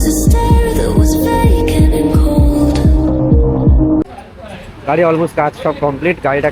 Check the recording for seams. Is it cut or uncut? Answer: cut